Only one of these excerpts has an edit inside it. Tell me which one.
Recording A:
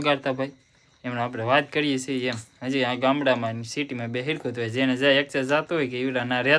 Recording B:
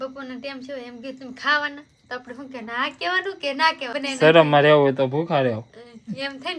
B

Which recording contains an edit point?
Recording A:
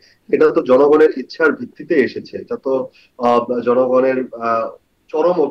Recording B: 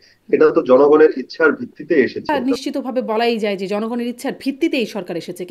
B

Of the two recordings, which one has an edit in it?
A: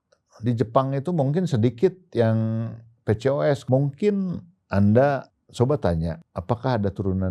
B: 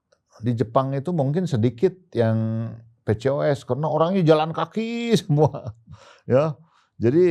A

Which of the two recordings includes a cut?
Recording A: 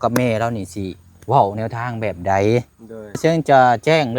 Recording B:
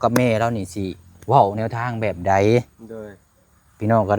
A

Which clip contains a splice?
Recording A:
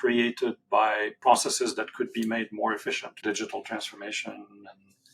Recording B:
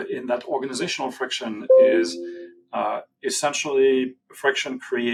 A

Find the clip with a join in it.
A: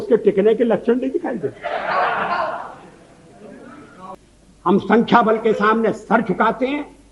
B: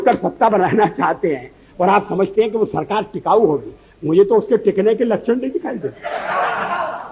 A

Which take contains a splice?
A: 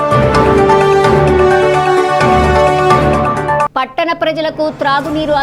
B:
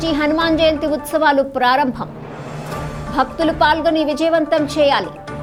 A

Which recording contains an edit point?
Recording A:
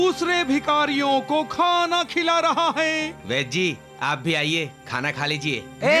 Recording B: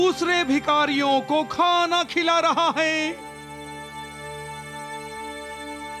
A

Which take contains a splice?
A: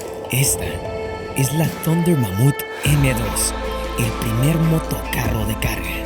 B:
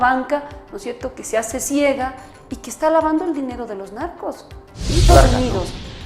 B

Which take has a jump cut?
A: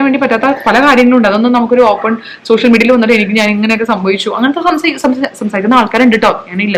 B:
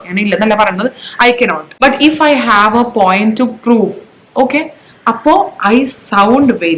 B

